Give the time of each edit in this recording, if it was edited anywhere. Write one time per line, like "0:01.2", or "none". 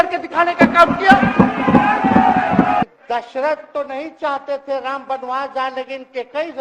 0:02.9